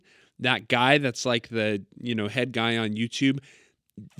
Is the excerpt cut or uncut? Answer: uncut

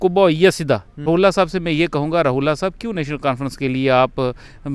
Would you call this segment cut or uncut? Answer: cut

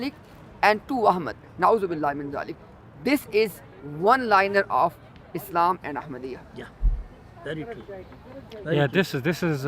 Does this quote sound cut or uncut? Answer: uncut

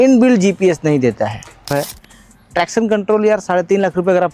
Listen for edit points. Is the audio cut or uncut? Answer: cut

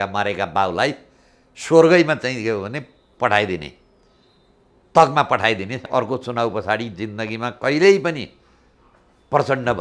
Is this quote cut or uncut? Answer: cut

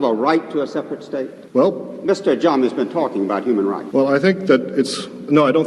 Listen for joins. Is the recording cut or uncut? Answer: cut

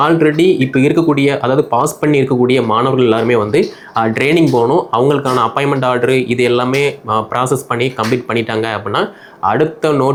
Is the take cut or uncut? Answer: uncut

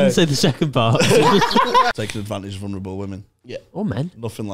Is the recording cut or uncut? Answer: cut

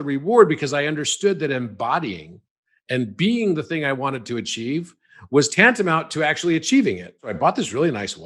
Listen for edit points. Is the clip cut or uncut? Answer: cut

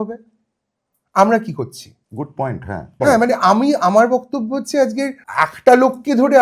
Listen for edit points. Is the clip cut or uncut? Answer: cut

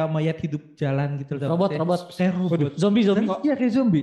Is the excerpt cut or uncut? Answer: uncut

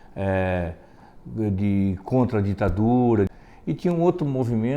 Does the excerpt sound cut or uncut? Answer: cut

